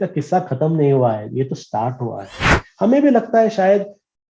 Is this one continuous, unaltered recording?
no; 1 cut; at 2.7 s

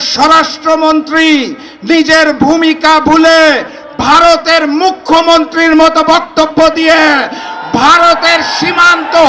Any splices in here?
no; 0 cuts

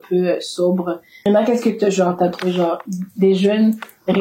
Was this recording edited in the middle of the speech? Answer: yes; 1 cut; at 1.3 s

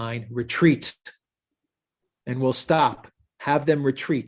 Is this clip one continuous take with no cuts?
yes; 0 cuts

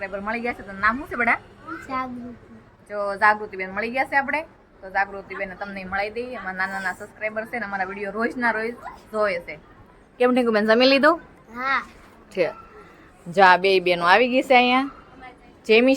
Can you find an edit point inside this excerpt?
no; 0 cuts

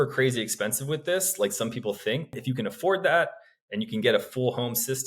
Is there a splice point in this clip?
yes; 1 cut; at 2.3 s

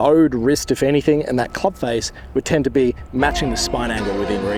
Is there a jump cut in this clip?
no; 0 cuts

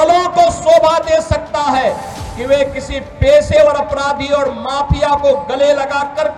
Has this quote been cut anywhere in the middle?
no; 0 cuts

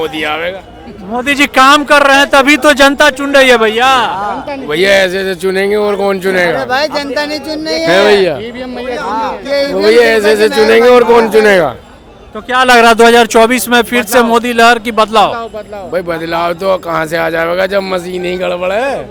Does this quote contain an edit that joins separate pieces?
no; 0 cuts

